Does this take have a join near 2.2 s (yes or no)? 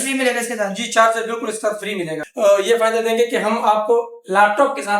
yes